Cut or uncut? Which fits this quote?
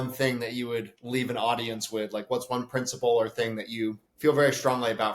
cut